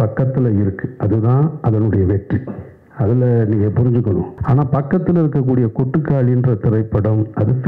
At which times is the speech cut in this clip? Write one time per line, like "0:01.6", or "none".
0:04.4

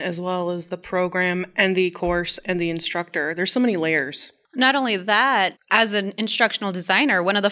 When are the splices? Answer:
0:05.6

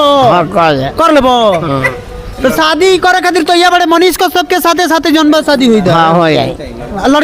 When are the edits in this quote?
none

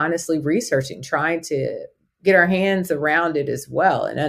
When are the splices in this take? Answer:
0:01.0

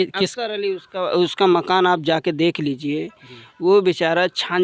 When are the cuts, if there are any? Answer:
none

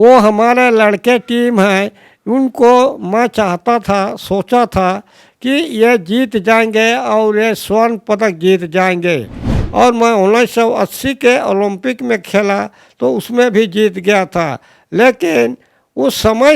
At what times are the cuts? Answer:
0:09.5

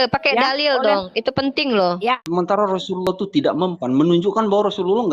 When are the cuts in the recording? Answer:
0:02.2

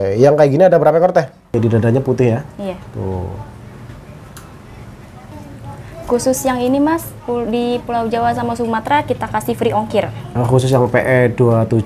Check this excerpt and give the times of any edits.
0:01.5

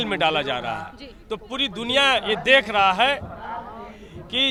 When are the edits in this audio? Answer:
none

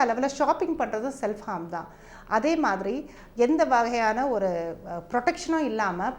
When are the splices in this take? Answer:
none

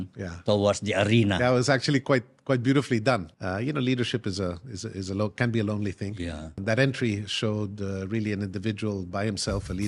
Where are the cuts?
0:03.3
0:06.5

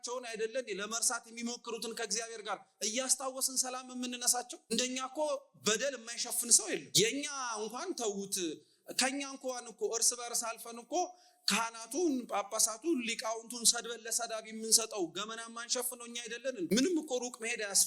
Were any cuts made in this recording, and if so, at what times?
0:04.7
0:07.0
0:16.7

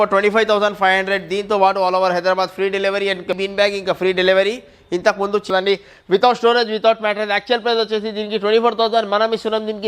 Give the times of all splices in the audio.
0:03.4
0:05.5

